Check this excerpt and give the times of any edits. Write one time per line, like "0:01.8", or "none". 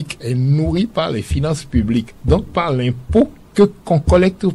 0:02.1